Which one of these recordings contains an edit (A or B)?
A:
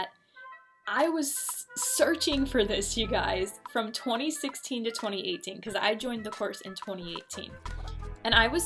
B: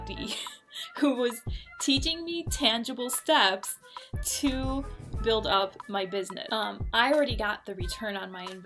B